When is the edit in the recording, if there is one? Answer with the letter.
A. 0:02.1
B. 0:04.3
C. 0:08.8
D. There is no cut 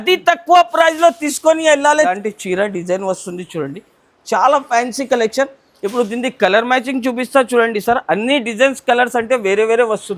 A